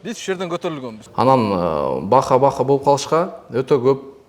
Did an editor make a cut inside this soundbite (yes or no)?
yes